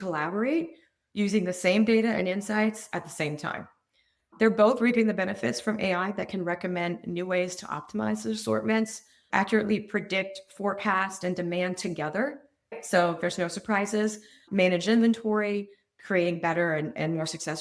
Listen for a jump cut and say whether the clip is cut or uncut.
cut